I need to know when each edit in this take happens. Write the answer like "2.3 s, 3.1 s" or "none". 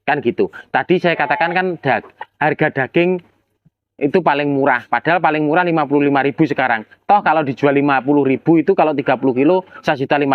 none